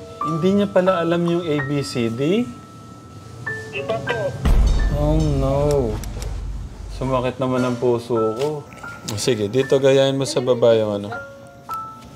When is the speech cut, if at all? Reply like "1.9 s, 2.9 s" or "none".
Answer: 8.7 s